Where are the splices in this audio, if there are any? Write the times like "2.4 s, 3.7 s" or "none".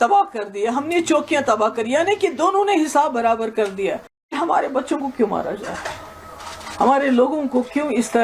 4.4 s